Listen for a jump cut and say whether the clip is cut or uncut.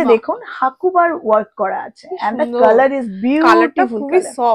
uncut